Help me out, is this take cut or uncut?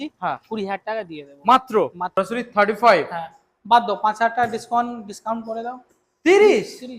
cut